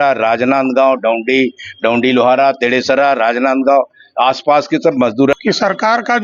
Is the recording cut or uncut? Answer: cut